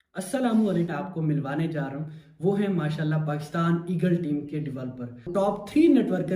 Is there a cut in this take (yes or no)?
yes